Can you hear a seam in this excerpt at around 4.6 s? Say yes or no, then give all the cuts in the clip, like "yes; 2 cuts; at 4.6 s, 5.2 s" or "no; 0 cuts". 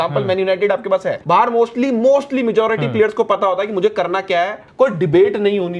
yes; 2 cuts; at 1.1 s, 4.6 s